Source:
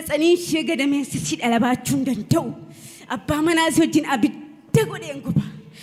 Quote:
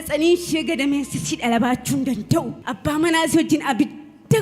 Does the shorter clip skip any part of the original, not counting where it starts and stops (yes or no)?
yes